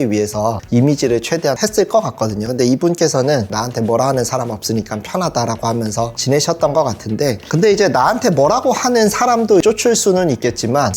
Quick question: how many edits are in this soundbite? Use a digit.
1